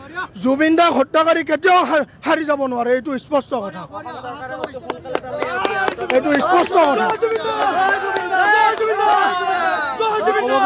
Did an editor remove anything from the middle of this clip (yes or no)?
no